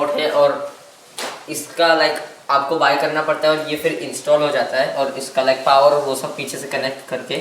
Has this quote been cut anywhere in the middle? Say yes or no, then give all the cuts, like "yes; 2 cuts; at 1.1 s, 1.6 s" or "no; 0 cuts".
no; 0 cuts